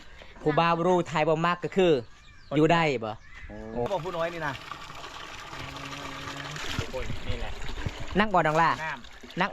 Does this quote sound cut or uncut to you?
cut